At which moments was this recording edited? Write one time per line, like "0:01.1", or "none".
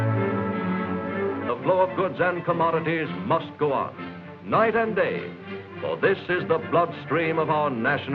none